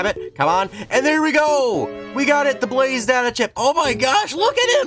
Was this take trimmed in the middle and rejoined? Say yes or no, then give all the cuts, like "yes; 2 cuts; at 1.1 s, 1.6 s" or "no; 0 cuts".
no; 0 cuts